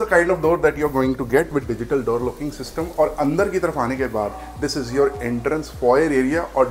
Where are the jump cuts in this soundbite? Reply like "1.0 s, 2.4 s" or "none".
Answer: none